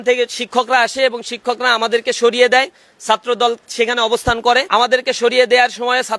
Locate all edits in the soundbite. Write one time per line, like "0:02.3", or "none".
0:04.6